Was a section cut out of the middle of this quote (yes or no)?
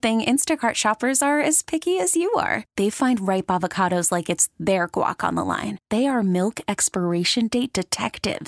no